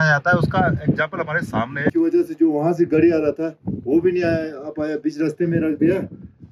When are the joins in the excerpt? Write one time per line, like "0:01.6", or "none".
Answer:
0:01.9